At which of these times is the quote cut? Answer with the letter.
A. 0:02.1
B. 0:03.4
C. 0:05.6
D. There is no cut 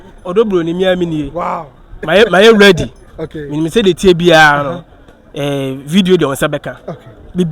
A